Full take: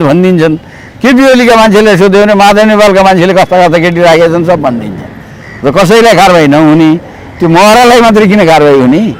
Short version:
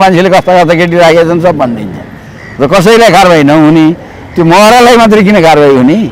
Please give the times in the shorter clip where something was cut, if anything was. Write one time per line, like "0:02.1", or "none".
none